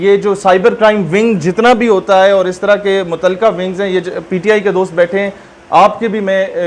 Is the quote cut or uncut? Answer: uncut